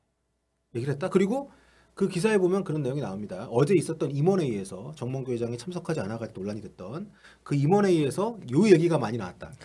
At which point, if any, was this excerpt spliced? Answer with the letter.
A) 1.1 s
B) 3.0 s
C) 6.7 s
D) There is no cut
D